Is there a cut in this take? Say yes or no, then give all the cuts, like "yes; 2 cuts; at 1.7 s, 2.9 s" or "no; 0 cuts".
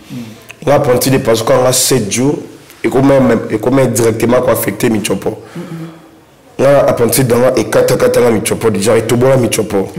no; 0 cuts